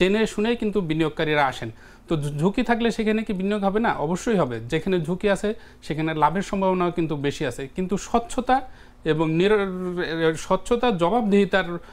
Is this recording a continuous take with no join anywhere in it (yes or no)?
yes